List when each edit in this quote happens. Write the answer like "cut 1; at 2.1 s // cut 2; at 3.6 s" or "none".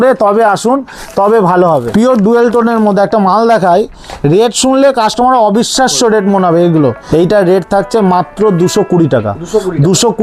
cut 1; at 1.9 s // cut 2; at 7.0 s